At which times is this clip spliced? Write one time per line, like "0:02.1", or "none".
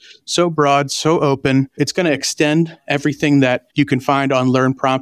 0:01.7